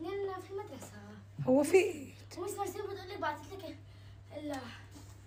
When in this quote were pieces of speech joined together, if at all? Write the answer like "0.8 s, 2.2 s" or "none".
none